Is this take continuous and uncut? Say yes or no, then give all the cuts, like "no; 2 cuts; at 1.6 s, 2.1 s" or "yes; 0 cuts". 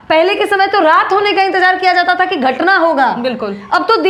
yes; 0 cuts